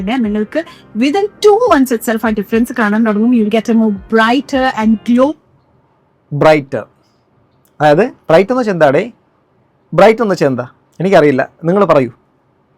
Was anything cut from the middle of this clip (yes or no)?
no